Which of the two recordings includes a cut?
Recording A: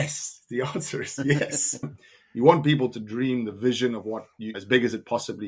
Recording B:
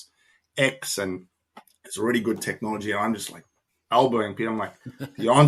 A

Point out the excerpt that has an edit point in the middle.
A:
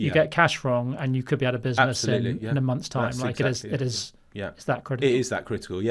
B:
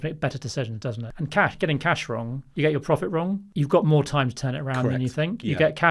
B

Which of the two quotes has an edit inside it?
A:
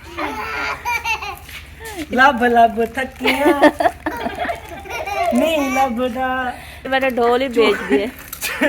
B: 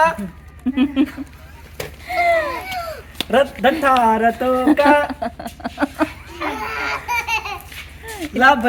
A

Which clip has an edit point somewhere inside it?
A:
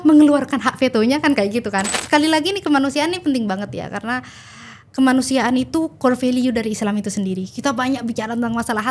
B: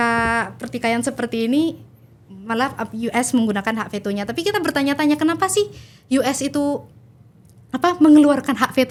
A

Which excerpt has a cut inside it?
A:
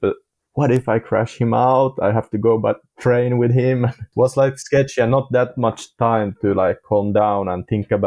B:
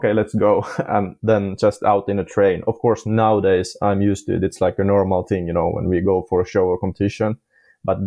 A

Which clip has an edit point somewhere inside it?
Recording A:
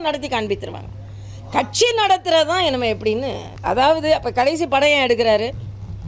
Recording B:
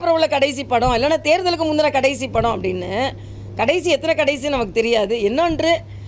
A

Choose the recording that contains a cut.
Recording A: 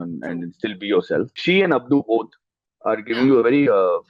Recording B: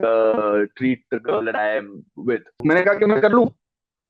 B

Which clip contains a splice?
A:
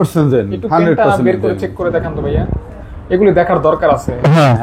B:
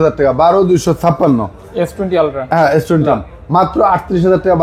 B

